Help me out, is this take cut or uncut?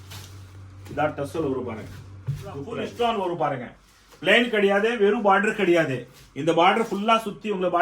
cut